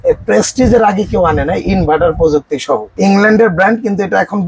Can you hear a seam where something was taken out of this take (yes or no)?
yes